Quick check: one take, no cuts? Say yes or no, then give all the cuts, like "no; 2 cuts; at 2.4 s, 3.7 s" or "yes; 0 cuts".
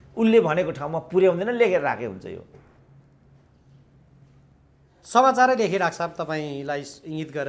yes; 0 cuts